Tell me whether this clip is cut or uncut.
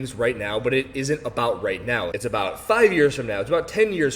cut